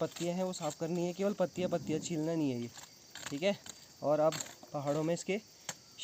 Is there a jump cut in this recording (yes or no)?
no